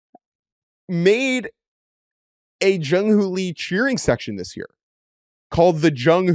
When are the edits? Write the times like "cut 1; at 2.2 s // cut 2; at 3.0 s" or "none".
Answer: none